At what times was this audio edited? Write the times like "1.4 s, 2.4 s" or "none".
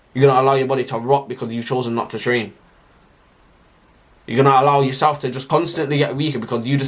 5.4 s

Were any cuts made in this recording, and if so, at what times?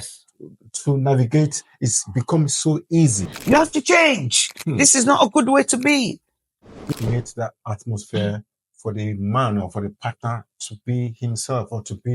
3.3 s, 6.8 s

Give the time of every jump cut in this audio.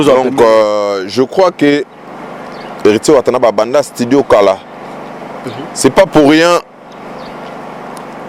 none

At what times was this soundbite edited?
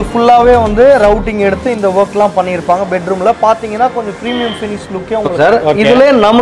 5.3 s

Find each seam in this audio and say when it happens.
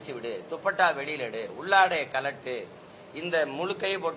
none

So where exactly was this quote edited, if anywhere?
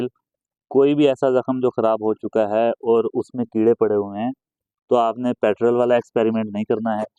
none

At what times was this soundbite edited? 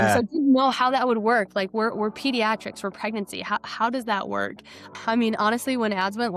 4.9 s

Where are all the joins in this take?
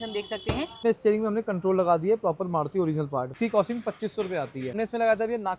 0.8 s, 3.4 s, 4.7 s

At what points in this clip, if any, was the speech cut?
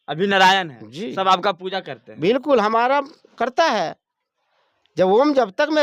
none

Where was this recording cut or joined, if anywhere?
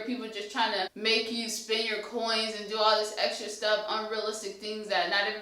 0.9 s

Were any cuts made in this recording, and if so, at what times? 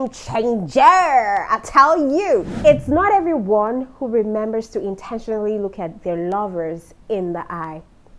2.5 s

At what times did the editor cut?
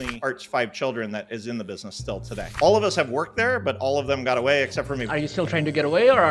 5.0 s

